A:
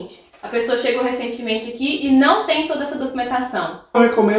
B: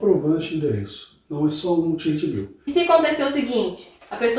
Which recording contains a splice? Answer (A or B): B